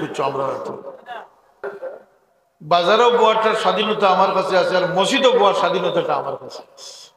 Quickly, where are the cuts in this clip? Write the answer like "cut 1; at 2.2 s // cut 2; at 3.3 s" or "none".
cut 1; at 1.6 s